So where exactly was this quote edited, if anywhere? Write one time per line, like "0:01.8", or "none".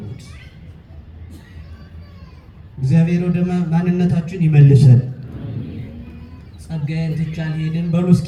none

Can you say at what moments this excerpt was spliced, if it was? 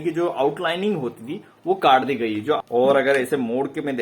0:02.6

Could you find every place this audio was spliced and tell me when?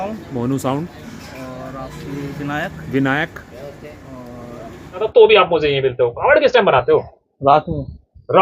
0:05.1

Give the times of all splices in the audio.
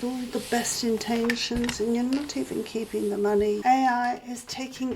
0:03.6

